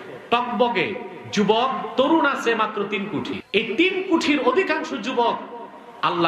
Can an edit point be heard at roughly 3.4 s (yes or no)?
yes